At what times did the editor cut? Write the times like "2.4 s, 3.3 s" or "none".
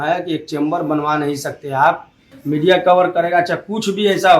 2.3 s